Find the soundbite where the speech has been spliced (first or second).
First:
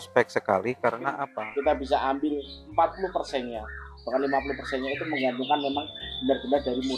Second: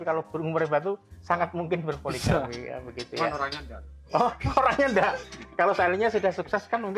first